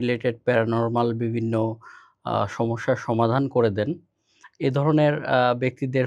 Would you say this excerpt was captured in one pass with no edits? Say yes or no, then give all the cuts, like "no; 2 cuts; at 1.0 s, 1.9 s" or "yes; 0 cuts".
yes; 0 cuts